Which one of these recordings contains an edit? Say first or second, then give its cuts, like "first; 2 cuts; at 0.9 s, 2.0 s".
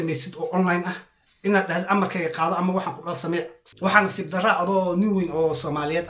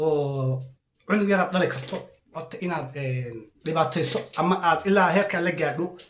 first; 1 cut; at 3.6 s